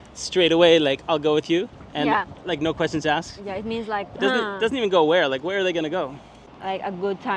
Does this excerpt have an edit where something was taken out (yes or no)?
yes